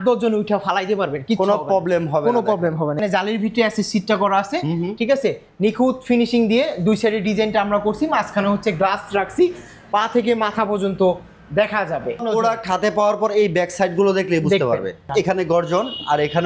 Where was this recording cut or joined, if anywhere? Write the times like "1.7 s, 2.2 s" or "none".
3.0 s, 12.2 s, 15.0 s

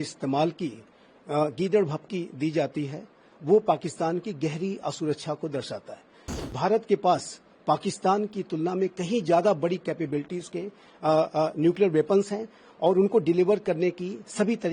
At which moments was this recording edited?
6.5 s

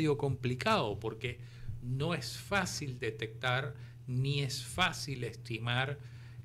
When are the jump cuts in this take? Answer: none

